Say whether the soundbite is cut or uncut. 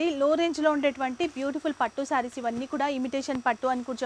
uncut